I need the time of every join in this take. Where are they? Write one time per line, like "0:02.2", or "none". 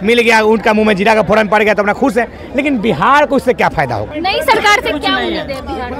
0:04.1